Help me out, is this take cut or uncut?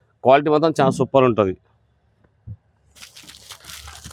uncut